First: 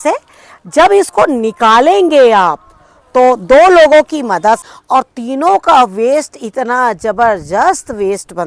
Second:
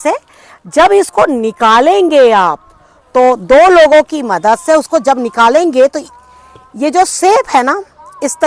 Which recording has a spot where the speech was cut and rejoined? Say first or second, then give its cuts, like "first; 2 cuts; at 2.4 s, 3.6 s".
first; 1 cut; at 4.6 s